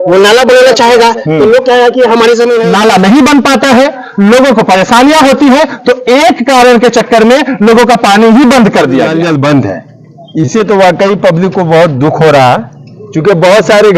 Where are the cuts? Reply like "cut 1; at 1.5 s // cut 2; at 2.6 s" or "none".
cut 1; at 2.7 s // cut 2; at 9.1 s